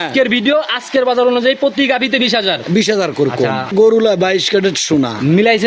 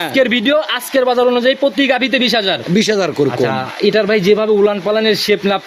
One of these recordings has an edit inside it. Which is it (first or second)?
first